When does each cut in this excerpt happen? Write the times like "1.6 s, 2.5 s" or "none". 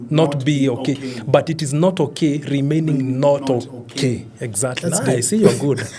none